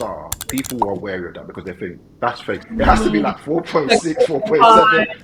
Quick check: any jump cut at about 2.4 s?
yes; 1 cut; at 2.4 s

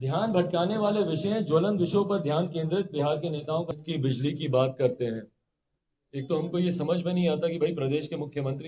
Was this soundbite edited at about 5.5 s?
no; 1 cut; at 3.7 s

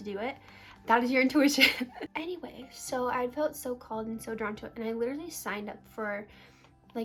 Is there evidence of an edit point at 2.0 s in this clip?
no; 0 cuts

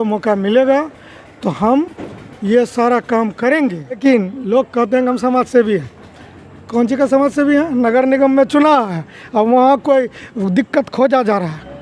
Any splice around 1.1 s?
no; 1 cut; at 4.0 s

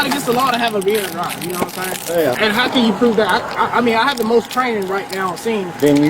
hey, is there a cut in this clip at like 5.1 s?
no; 1 cut; at 2.4 s

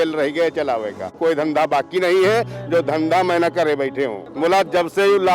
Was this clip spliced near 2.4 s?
no; 2 cuts; at 1.2 s, 4.2 s

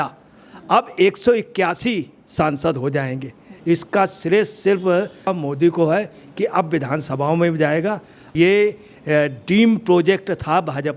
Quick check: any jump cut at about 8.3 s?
yes; 3 cuts; at 3.5 s, 5.3 s, 8.3 s

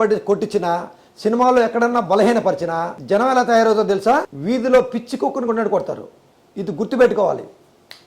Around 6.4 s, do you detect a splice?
no; 2 cuts; at 2.9 s, 4.3 s

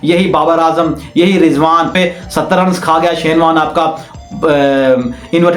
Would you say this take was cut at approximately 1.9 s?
yes; 1 cut; at 1.9 s

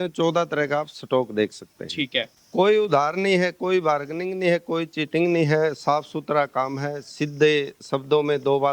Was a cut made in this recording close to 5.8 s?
no; 1 cut; at 2.3 s

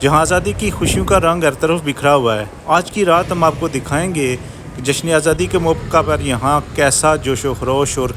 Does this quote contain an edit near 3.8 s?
no; 0 cuts

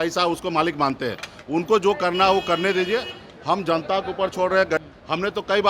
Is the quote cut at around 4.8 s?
yes; 1 cut; at 4.8 s

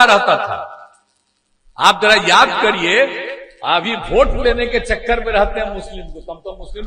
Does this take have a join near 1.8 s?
no; 0 cuts

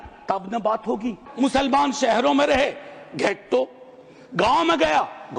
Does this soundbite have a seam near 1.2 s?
yes; 1 cut; at 1.2 s

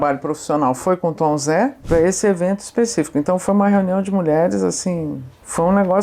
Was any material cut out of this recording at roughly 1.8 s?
yes; 1 cut; at 1.8 s

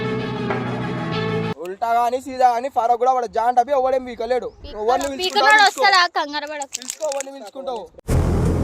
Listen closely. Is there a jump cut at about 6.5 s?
no; 1 cut; at 1.6 s

